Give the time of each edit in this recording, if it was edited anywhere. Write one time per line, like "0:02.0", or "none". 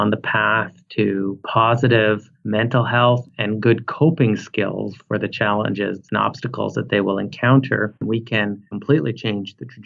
0:08.4